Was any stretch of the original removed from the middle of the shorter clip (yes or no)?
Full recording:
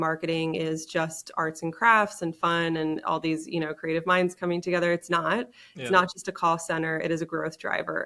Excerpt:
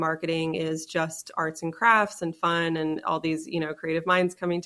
no